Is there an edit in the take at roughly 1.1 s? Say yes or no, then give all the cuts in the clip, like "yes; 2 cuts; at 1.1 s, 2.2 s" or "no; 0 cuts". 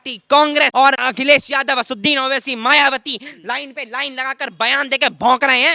yes; 1 cut; at 1.1 s